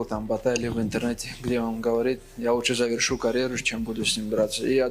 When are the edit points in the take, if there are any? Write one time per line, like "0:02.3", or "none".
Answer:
none